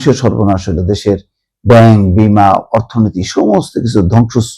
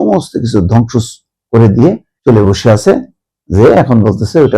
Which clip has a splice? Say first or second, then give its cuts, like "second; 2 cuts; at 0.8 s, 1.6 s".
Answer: second; 1 cut; at 2.1 s